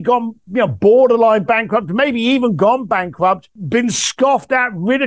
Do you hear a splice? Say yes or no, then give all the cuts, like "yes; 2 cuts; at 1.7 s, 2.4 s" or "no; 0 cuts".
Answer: yes; 1 cut; at 3.6 s